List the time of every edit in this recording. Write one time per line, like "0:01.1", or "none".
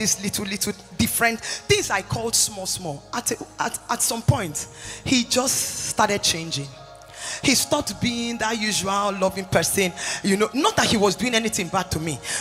none